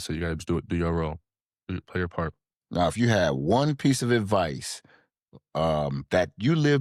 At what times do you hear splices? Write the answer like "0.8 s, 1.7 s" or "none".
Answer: none